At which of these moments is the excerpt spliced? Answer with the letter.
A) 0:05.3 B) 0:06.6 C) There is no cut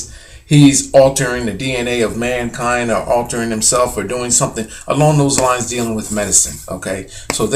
A